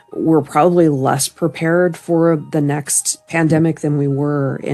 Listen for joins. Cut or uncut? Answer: uncut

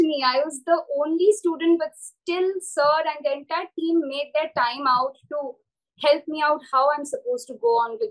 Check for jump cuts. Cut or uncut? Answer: uncut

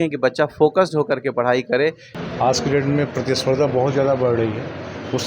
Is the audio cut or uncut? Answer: cut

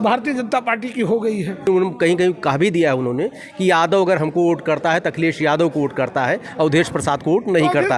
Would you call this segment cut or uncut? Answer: cut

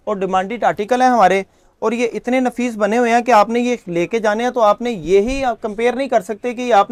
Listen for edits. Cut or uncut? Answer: uncut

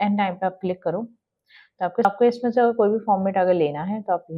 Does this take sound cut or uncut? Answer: cut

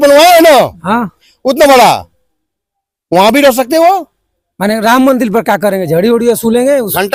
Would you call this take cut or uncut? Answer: uncut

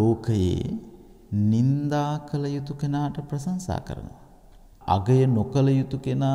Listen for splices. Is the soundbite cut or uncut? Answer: cut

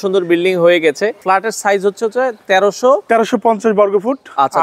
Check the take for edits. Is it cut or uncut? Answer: cut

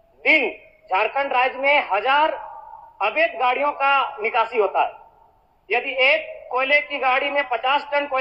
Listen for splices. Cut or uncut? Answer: uncut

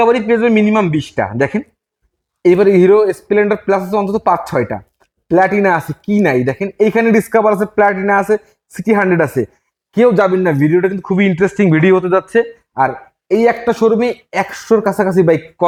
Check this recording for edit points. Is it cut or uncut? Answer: uncut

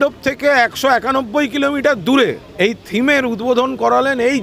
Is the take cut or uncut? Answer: cut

